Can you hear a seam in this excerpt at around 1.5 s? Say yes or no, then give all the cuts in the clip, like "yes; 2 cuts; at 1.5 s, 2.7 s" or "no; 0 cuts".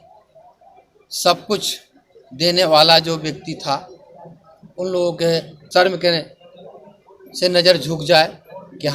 no; 1 cut; at 5.6 s